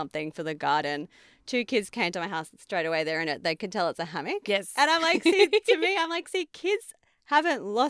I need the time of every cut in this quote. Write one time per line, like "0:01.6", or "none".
none

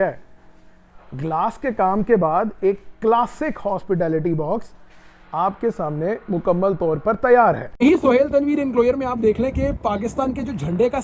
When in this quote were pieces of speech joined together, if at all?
0:07.7

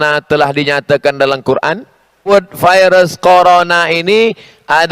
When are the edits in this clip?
0:02.2

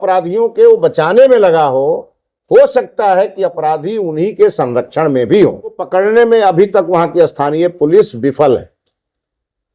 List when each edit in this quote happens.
0:05.8

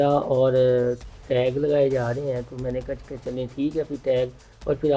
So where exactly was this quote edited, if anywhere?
none

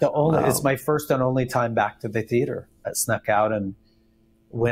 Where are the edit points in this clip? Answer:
0:02.8

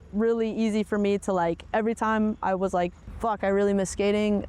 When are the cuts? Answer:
0:03.0

